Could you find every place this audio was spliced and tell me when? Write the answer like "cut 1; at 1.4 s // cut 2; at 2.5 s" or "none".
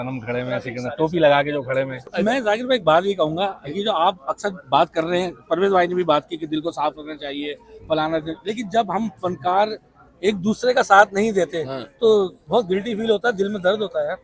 cut 1; at 2.1 s